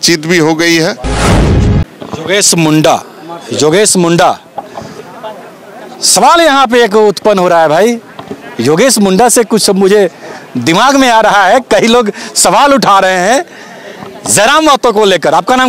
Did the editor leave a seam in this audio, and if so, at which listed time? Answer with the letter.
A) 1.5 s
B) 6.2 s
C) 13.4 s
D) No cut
A